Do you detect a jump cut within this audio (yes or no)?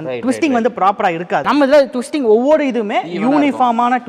no